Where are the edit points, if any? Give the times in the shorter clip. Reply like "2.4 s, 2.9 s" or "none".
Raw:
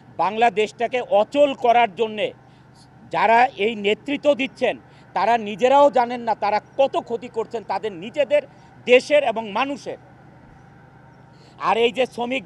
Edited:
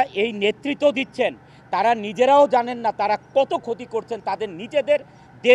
none